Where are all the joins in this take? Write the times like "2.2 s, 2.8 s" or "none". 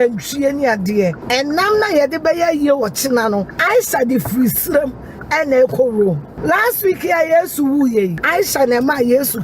1.2 s, 3.5 s, 6.3 s, 8.2 s